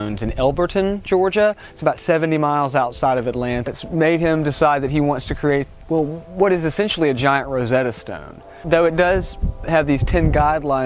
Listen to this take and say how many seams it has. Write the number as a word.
zero